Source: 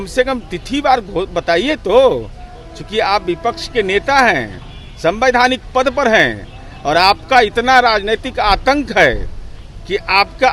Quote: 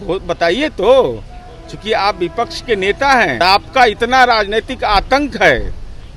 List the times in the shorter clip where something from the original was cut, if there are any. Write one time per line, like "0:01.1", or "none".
0:03.4